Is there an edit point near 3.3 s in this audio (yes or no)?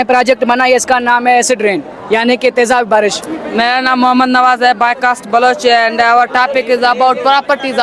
yes